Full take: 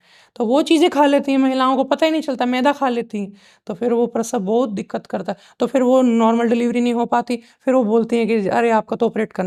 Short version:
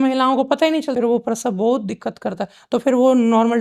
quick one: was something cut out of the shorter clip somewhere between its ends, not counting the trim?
yes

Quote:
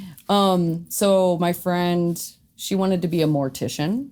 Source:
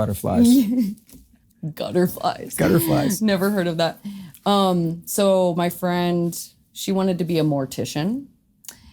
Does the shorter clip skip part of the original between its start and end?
no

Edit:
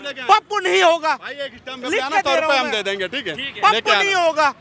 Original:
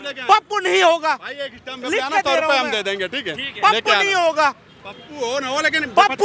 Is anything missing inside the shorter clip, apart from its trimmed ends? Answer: no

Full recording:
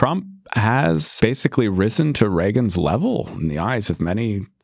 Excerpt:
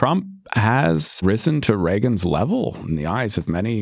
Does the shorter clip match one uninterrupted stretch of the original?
no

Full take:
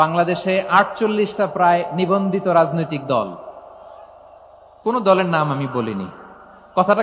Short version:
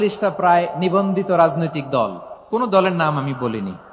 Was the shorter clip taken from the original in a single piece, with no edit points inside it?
no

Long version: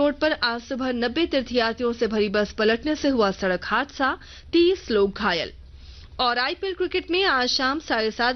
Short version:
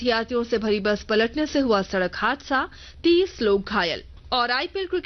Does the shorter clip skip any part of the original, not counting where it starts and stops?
yes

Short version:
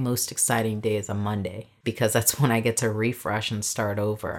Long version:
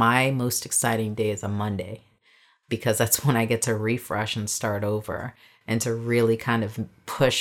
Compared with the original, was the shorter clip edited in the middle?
yes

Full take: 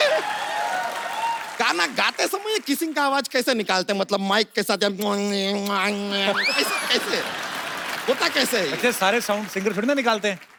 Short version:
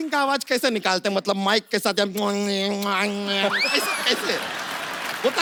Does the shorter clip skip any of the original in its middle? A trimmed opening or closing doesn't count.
no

